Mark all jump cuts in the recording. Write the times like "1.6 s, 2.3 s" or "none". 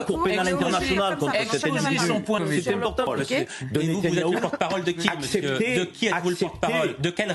3.1 s